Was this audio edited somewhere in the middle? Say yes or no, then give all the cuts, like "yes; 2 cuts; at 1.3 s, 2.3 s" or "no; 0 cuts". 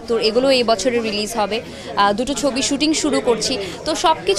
no; 0 cuts